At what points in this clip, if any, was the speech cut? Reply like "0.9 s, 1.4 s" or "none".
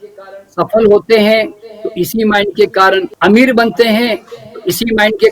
3.1 s